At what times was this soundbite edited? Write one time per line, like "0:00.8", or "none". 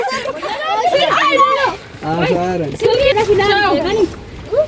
0:03.1